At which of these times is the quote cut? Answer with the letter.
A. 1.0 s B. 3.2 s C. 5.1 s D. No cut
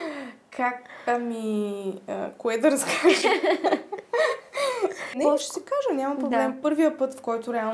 C